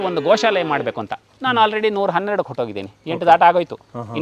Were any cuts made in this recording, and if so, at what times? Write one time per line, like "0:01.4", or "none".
none